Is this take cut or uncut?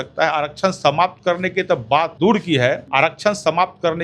cut